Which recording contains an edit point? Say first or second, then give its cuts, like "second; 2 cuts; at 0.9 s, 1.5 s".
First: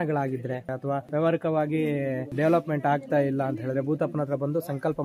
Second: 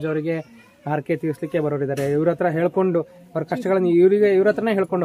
first; 2 cuts; at 0.9 s, 2.3 s